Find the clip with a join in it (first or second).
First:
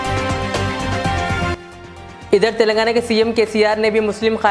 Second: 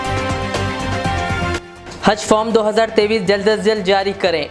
second